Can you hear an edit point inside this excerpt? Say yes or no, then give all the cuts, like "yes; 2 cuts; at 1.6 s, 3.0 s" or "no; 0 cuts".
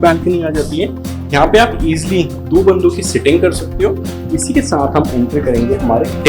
yes; 1 cut; at 4.1 s